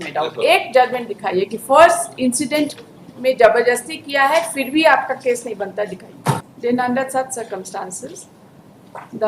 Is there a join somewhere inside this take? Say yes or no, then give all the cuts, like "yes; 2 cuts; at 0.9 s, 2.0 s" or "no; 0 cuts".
yes; 1 cut; at 6.5 s